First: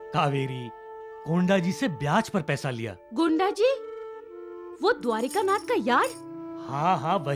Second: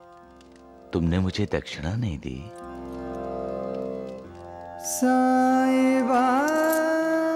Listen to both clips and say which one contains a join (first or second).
second